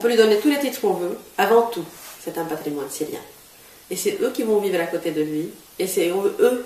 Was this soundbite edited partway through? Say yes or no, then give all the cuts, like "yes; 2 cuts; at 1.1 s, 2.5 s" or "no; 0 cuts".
yes; 1 cut; at 1.2 s